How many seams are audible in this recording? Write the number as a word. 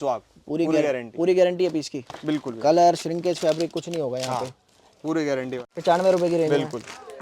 one